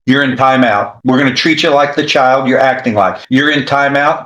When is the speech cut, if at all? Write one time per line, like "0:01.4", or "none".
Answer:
0:00.9
0:03.2